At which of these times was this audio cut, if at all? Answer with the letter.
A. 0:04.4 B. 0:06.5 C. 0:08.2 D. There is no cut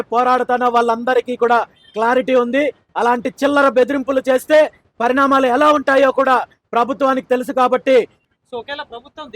C